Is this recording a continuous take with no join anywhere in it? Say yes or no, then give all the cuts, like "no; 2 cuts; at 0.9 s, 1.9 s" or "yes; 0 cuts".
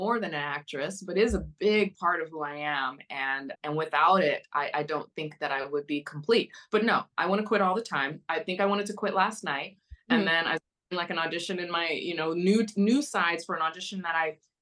no; 1 cut; at 3.5 s